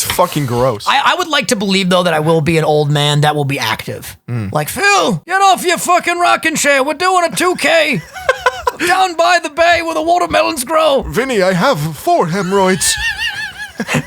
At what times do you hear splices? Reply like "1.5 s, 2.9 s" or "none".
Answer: 5.2 s